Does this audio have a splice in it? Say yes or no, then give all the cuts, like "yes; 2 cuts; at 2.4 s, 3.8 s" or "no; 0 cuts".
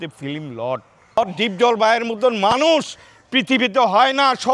yes; 1 cut; at 1.1 s